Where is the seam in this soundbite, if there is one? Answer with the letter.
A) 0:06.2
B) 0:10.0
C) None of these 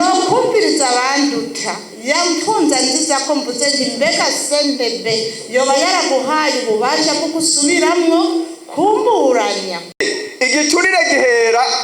B